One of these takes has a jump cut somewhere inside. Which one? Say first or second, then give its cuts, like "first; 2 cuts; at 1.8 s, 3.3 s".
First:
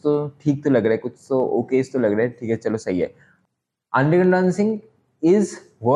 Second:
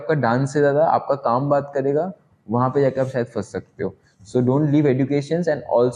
first; 1 cut; at 3.3 s